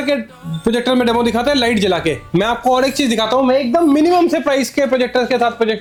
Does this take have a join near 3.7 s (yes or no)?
no